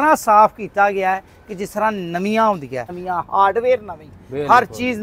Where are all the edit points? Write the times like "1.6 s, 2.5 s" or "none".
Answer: 3.0 s